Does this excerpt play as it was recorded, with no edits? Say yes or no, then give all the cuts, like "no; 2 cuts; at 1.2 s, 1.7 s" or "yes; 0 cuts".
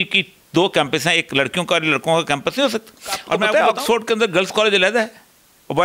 no; 1 cut; at 3.5 s